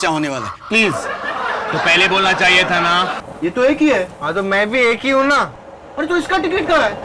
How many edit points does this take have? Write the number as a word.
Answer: one